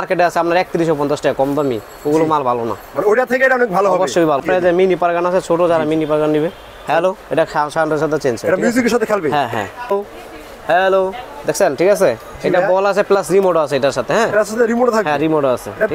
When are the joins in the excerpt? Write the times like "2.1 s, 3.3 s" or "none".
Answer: 4.4 s, 9.9 s

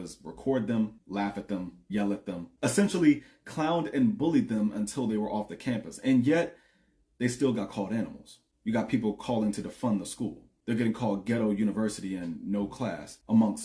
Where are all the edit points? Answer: none

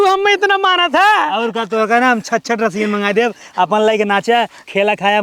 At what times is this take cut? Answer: none

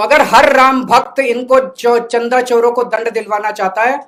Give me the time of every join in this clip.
none

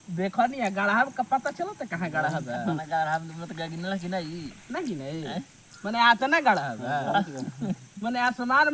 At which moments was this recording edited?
none

